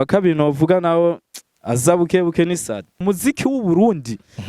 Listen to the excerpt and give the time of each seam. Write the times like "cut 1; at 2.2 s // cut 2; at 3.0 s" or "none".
cut 1; at 3.0 s